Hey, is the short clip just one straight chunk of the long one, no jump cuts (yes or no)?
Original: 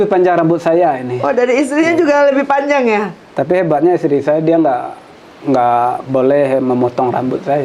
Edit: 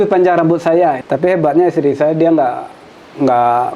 no